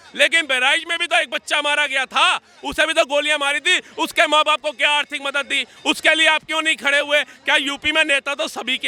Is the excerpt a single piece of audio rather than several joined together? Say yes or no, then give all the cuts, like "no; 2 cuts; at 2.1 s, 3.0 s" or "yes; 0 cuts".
yes; 0 cuts